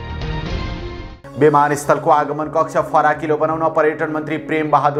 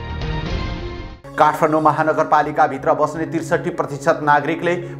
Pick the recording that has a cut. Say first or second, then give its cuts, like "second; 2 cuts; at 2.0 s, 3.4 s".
second; 1 cut; at 1.1 s